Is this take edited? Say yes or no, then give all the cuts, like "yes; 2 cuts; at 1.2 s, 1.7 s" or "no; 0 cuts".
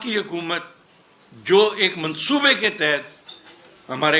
no; 0 cuts